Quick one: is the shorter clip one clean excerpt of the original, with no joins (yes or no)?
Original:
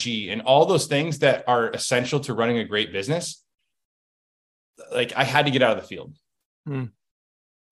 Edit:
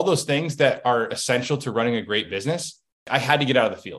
no